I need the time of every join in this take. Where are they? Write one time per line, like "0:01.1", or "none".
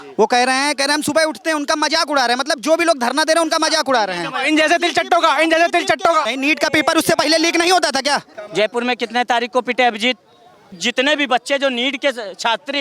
0:06.2
0:08.3
0:10.8